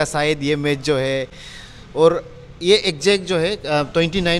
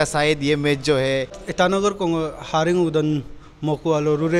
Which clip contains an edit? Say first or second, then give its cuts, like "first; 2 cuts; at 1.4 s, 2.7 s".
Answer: second; 1 cut; at 1.4 s